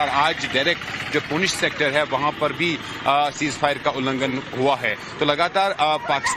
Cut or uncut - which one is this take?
cut